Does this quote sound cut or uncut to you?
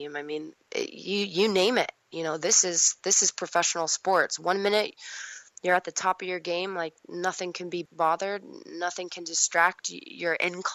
cut